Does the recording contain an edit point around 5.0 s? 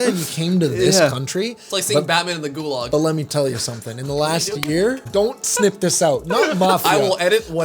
yes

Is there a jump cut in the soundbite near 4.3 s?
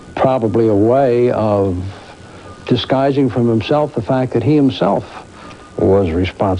no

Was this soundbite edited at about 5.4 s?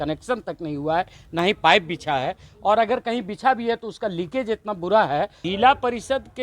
yes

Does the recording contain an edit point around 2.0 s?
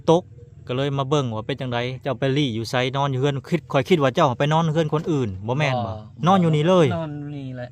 yes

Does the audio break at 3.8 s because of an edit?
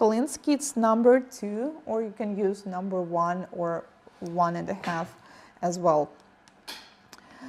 no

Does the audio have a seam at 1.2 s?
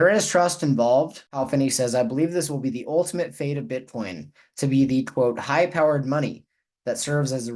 yes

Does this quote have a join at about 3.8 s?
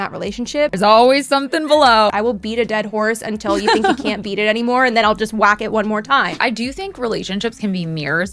no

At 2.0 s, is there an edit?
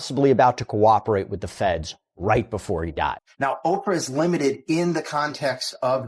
no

